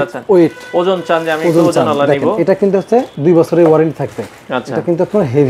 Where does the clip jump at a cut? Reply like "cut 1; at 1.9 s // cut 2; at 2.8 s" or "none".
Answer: cut 1; at 3.1 s

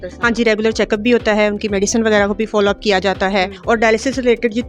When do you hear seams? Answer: cut 1; at 3.5 s

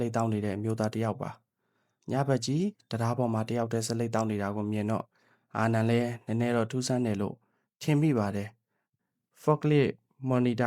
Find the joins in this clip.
cut 1; at 8.9 s

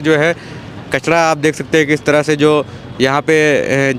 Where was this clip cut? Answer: none

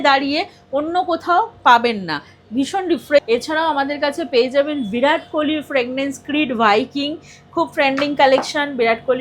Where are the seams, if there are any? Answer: cut 1; at 3.2 s

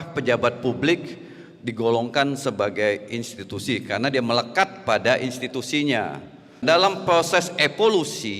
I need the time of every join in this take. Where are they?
cut 1; at 6.6 s

